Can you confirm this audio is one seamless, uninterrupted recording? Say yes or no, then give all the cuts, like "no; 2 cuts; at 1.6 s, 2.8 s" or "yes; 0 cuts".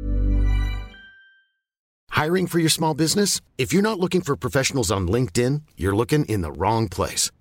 no; 1 cut; at 1.9 s